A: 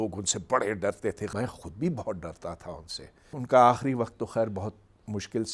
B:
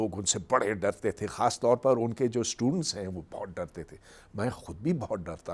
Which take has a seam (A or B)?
A